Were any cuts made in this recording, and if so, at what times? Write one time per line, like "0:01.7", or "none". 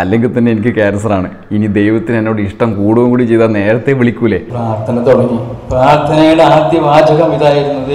0:04.5

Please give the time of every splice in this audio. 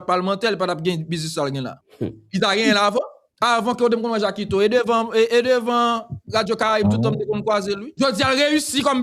0:01.8
0:03.2
0:07.9

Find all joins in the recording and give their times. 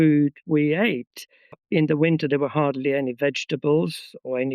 0:01.6

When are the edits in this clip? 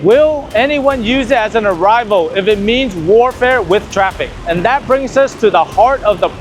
0:04.3

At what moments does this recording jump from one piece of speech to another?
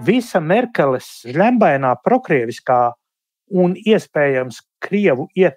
0:01.3

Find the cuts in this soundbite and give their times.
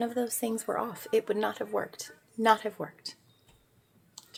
none

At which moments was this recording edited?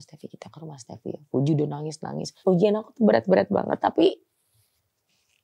0:02.3

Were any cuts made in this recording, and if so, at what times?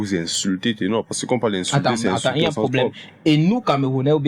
none

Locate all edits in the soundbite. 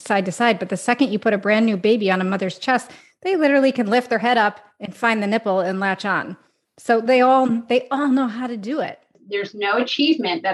0:09.2

